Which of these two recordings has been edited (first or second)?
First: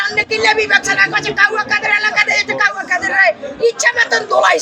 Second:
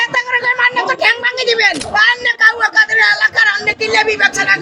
second